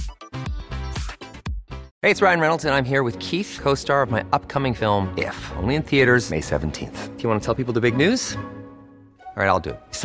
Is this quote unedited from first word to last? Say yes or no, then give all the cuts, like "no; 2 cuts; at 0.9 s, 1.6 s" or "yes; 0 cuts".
no; 1 cut; at 1.9 s